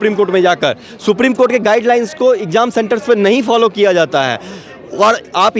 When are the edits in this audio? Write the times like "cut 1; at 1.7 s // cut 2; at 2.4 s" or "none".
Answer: none